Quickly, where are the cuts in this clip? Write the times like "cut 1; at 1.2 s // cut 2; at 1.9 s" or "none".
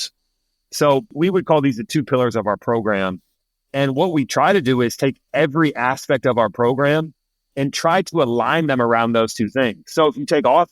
cut 1; at 1.1 s